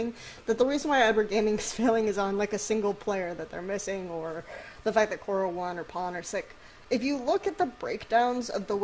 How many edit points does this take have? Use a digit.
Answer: 1